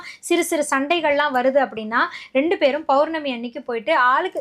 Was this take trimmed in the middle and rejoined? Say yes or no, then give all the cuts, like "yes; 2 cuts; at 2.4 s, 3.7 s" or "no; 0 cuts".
no; 0 cuts